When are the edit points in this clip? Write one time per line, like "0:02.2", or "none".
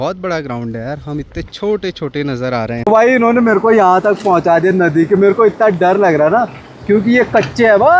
0:02.8